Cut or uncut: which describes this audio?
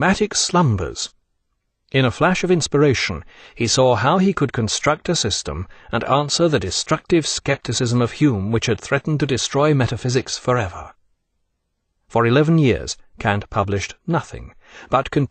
cut